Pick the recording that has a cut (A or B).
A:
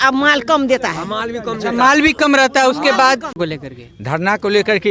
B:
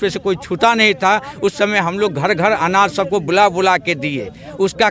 A